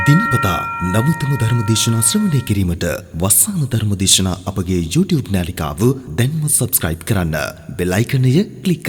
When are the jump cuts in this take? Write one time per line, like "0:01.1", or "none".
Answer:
none

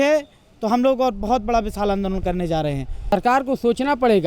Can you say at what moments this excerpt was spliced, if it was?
0:03.1

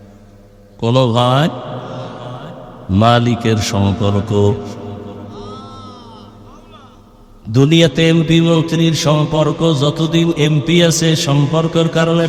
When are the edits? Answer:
none

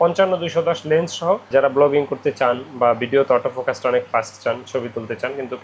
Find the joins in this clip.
0:01.5

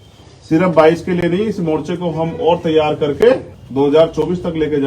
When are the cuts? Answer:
0:03.6

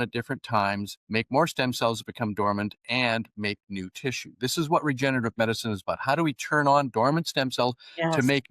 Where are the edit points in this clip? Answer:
0:00.9

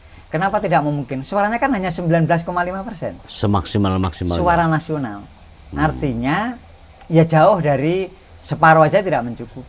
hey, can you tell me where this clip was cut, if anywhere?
none

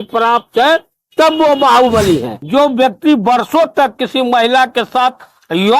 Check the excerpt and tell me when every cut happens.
0:02.3

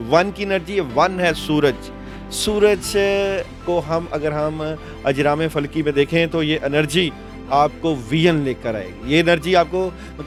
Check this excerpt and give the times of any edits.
none

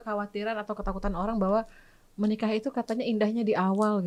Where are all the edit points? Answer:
none

